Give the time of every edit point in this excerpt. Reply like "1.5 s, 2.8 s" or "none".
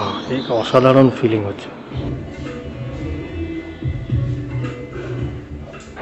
2.0 s